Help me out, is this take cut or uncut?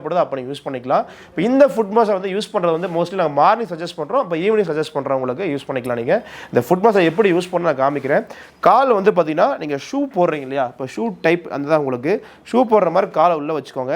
uncut